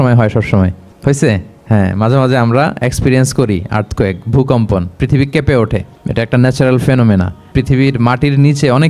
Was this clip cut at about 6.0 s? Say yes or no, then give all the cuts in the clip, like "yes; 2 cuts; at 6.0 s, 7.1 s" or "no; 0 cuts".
yes; 4 cuts; at 0.9 s, 1.5 s, 6.0 s, 7.4 s